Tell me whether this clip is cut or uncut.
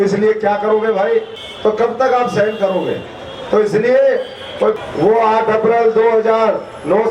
cut